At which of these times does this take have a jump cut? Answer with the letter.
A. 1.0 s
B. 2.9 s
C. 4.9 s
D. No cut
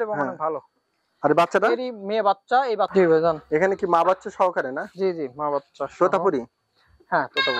B